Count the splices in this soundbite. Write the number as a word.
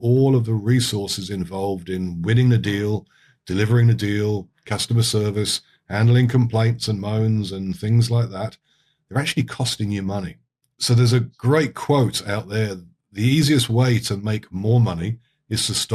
zero